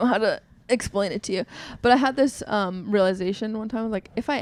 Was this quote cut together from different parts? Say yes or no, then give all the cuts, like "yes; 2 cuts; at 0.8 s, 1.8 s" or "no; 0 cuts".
no; 0 cuts